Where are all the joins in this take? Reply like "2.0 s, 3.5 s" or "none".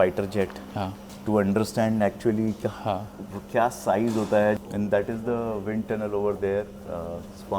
1.1 s, 4.6 s